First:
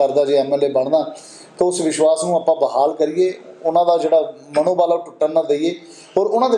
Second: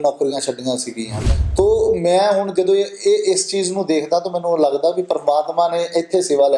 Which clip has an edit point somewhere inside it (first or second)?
second